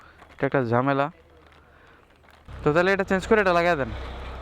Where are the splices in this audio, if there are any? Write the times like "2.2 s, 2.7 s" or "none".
2.5 s

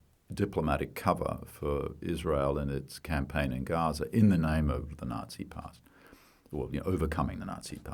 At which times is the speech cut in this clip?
none

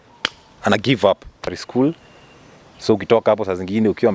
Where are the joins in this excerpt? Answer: 1.6 s

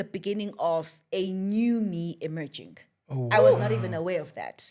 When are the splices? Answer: none

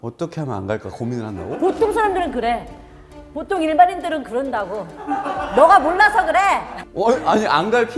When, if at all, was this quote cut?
6.7 s

